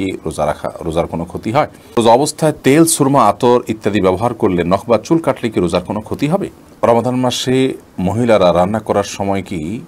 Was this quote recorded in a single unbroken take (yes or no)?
no